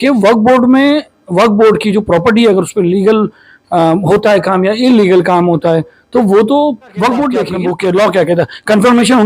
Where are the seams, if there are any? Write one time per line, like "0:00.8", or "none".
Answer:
0:07.5